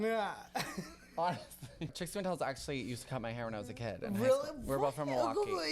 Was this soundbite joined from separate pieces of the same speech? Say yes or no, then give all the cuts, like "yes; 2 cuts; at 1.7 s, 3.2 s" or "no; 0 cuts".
yes; 1 cut; at 1.9 s